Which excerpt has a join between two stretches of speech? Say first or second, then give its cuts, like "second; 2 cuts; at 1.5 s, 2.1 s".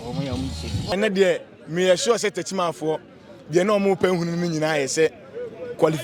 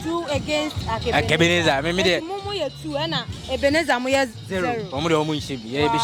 first; 1 cut; at 0.9 s